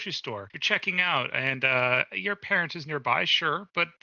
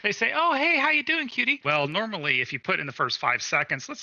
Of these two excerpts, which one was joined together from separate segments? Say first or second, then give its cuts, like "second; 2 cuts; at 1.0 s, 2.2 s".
second; 1 cut; at 1.6 s